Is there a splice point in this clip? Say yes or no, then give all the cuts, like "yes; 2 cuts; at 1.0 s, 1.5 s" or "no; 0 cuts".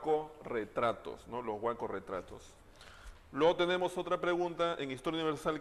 no; 0 cuts